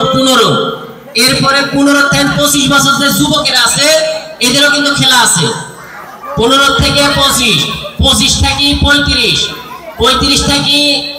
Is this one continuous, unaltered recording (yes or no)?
yes